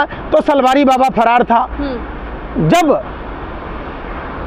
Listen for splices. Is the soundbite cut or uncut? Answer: uncut